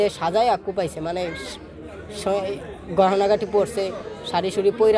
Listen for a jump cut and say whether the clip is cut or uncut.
uncut